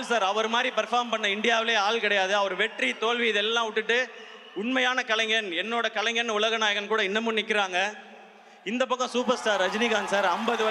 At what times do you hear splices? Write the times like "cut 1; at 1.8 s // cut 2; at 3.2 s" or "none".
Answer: none